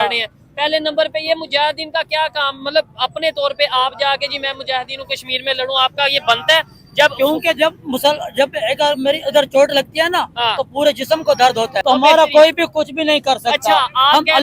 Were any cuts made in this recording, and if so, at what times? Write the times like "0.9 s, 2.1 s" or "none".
11.8 s